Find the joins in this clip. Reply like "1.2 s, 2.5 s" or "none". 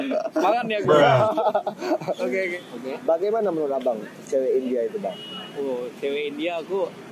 2.6 s